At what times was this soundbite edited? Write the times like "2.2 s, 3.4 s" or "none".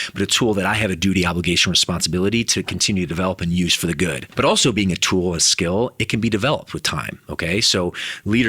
4.3 s